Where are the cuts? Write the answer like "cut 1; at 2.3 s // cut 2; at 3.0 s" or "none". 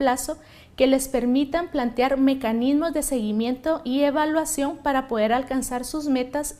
cut 1; at 3.6 s